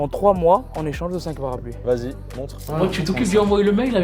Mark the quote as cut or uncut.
cut